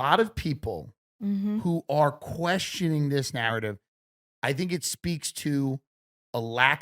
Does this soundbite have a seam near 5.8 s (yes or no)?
no